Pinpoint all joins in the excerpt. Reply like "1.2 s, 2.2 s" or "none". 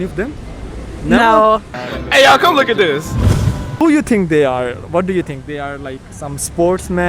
1.7 s